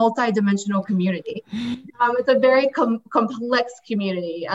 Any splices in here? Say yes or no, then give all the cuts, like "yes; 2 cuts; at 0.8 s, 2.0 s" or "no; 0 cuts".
yes; 1 cut; at 1.8 s